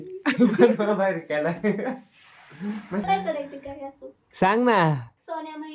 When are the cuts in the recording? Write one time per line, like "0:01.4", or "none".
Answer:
0:03.1